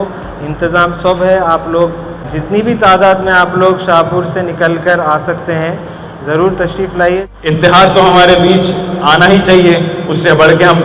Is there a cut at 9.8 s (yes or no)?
no